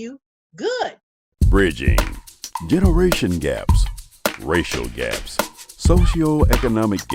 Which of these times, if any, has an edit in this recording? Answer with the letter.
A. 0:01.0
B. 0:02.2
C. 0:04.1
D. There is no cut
A